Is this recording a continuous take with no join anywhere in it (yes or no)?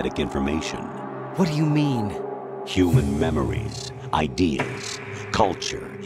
yes